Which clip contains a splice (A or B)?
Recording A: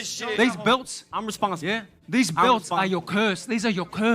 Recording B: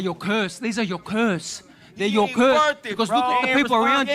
A